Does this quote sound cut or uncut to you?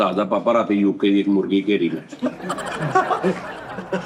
uncut